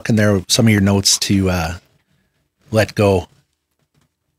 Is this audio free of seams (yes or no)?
yes